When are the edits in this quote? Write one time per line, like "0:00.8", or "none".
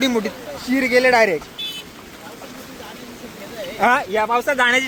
none